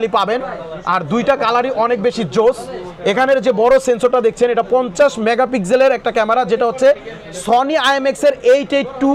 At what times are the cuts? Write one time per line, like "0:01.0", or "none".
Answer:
none